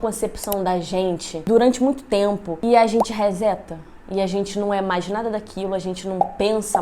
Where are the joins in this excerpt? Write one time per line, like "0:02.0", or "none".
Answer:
0:02.5